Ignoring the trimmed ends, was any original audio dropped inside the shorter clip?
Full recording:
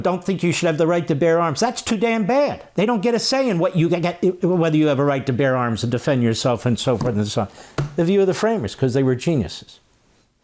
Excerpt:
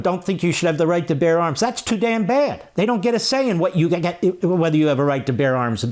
no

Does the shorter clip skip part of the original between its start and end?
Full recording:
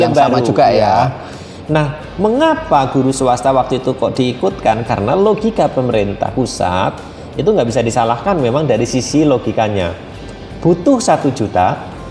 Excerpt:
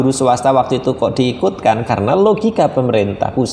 no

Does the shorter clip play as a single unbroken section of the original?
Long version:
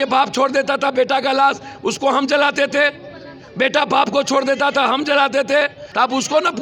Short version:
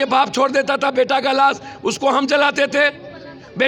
yes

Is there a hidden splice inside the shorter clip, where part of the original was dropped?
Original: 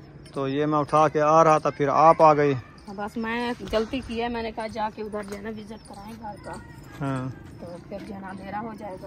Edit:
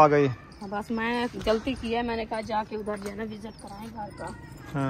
no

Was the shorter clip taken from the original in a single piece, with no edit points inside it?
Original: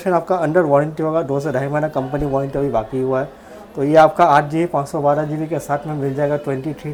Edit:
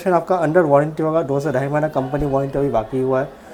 yes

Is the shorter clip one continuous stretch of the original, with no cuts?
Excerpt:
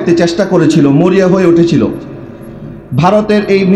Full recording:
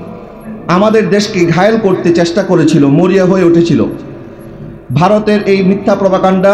yes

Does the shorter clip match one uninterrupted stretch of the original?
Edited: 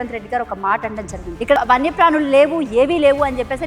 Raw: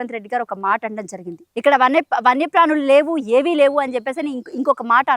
no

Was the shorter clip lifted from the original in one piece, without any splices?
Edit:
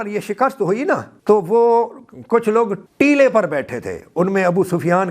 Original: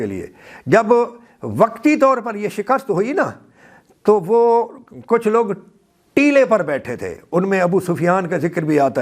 no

